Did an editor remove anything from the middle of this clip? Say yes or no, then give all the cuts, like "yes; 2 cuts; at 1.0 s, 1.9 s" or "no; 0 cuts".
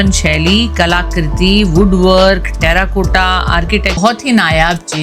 yes; 1 cut; at 4.0 s